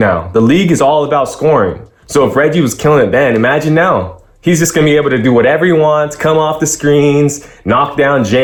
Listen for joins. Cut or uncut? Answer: uncut